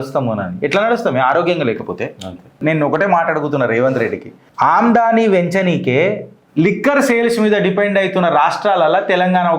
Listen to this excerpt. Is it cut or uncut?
cut